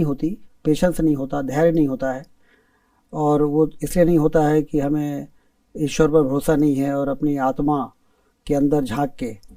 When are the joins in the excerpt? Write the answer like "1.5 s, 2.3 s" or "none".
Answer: none